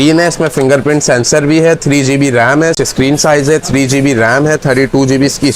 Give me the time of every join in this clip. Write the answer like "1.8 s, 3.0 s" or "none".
2.8 s